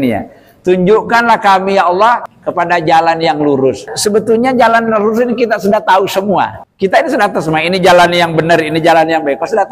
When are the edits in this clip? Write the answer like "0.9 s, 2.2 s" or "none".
2.3 s, 3.9 s, 6.6 s